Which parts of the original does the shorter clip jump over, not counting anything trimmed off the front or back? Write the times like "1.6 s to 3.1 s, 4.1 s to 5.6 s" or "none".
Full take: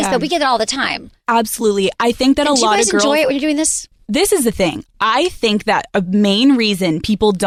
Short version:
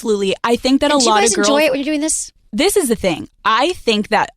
none